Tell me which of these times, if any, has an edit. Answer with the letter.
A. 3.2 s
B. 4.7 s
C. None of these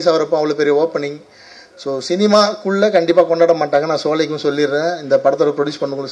C